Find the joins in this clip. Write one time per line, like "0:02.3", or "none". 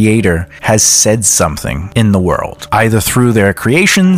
none